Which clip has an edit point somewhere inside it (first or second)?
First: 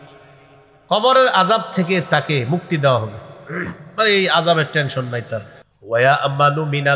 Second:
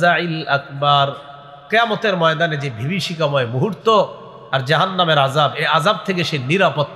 first